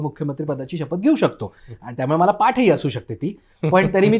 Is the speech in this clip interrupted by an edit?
no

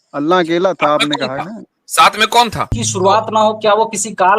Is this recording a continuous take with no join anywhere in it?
no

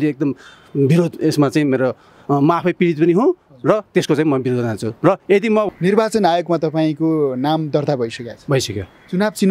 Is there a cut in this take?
yes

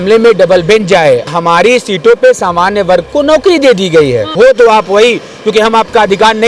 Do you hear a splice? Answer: yes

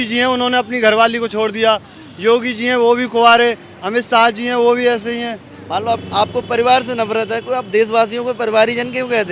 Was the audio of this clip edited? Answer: yes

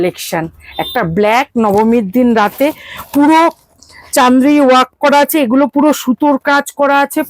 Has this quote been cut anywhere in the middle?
no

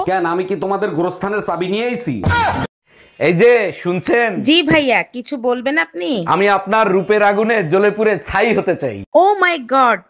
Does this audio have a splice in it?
yes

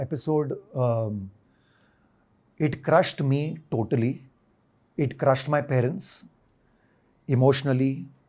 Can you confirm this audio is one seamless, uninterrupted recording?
yes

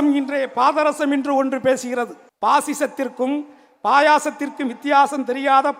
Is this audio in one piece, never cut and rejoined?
no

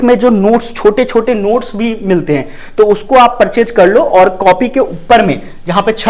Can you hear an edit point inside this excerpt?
no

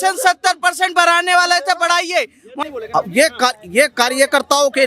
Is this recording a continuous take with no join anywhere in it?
no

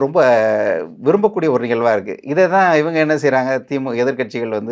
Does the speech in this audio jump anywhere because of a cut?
no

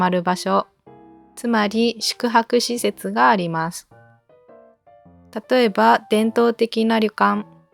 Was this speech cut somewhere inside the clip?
no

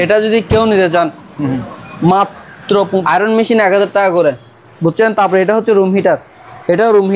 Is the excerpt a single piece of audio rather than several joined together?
no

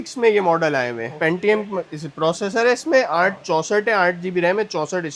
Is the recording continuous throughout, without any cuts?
yes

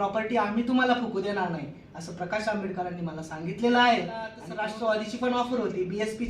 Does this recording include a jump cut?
yes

